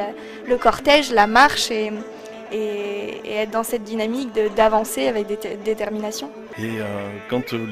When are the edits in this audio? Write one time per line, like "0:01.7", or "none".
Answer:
0:06.4